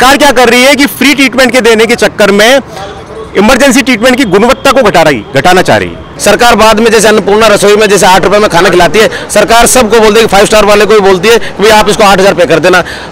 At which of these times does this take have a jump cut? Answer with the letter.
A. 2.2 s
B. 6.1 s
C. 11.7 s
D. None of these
B